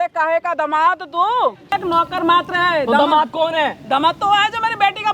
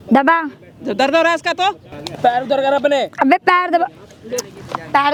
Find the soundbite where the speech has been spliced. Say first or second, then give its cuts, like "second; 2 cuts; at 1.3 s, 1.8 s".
first; 1 cut; at 1.7 s